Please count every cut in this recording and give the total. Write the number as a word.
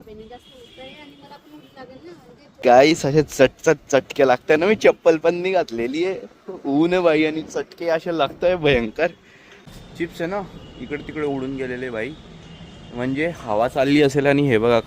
two